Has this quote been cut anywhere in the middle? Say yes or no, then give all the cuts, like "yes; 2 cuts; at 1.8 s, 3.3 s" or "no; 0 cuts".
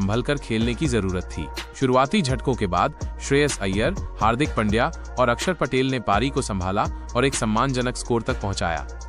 yes; 1 cut; at 1.6 s